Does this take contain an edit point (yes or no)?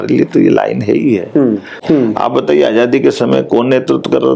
yes